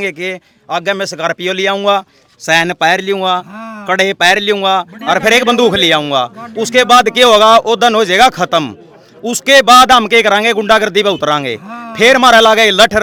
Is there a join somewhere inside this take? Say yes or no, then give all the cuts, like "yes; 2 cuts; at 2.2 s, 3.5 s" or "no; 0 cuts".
no; 0 cuts